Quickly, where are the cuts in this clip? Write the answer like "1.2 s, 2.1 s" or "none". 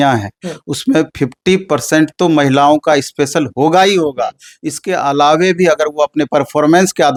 none